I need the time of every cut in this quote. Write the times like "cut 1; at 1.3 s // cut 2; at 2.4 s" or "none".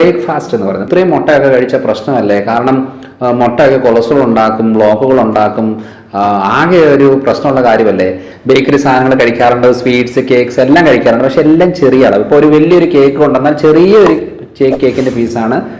cut 1; at 0.8 s // cut 2; at 8.3 s